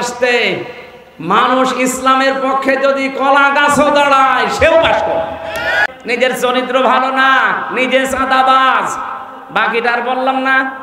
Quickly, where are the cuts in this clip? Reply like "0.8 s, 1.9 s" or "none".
5.8 s